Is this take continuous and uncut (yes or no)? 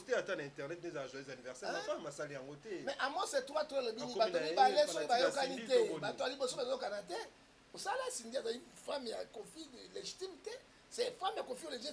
no